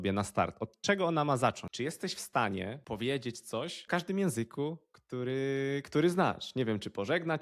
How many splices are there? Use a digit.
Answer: 3